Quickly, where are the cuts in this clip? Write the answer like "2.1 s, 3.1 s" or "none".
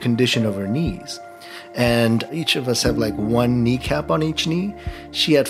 2.3 s